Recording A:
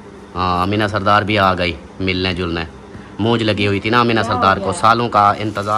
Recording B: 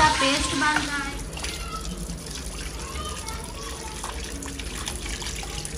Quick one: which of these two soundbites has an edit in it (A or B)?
B